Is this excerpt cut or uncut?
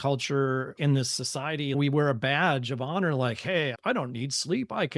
cut